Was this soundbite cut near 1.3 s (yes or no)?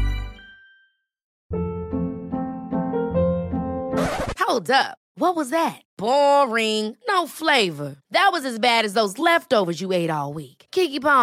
yes